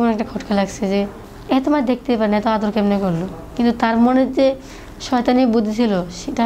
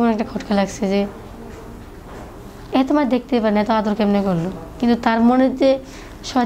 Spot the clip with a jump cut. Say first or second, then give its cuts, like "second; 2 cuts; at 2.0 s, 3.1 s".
first; 1 cut; at 1.3 s